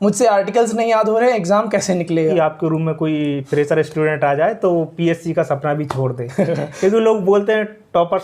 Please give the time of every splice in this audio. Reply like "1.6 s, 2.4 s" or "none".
2.3 s